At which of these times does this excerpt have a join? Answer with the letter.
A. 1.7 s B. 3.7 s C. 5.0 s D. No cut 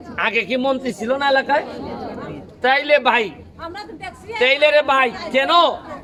D